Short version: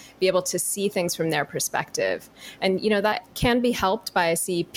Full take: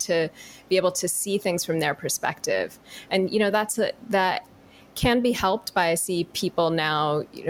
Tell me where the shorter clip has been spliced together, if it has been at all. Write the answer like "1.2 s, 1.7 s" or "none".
3.2 s